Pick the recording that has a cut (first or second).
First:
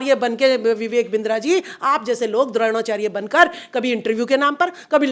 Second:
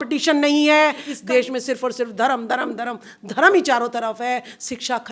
second